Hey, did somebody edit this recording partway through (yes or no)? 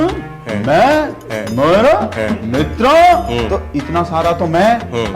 no